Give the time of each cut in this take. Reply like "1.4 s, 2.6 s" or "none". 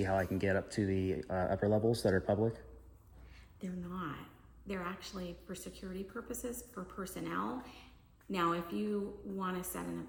none

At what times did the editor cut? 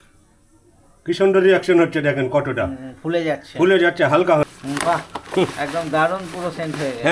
4.5 s

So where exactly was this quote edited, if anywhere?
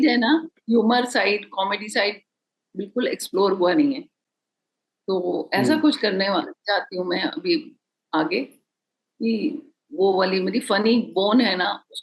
none

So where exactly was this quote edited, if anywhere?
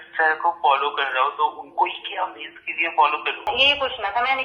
3.5 s

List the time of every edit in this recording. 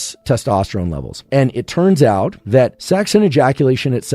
2.8 s

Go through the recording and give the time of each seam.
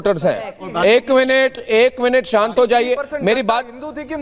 none

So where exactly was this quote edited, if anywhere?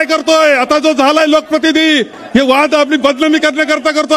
2.1 s

